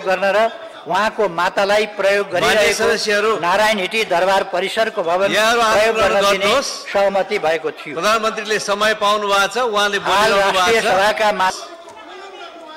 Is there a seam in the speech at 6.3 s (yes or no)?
no